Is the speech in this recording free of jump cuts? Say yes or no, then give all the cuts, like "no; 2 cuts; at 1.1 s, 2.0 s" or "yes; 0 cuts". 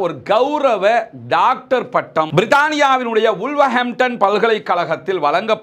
yes; 0 cuts